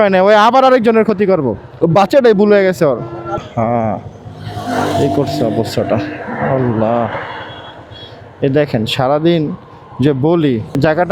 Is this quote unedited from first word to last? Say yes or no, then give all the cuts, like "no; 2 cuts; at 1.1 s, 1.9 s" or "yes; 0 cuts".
yes; 0 cuts